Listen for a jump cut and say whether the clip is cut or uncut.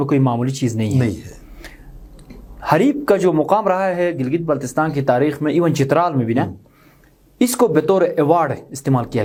uncut